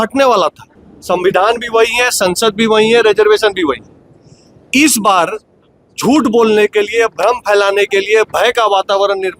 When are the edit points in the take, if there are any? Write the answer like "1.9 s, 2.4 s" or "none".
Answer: 0.9 s